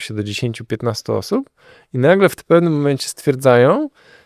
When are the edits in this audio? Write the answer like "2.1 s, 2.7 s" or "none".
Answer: none